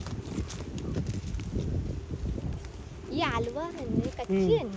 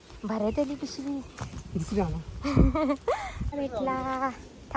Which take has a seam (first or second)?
second